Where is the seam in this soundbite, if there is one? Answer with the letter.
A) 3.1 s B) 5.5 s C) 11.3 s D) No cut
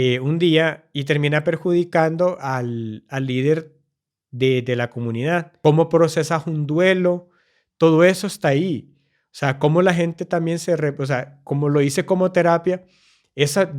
B